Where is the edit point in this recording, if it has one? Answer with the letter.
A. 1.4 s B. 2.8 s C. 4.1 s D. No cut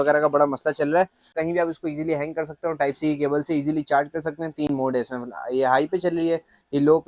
A